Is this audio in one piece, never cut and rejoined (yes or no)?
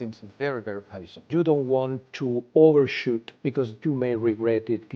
no